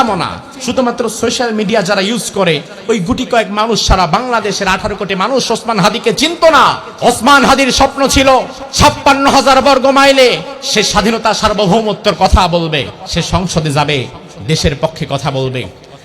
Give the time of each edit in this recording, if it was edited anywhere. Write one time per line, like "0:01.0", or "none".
0:06.9
0:08.6
0:10.5
0:13.0